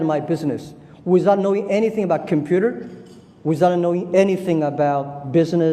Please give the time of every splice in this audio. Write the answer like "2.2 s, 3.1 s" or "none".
3.8 s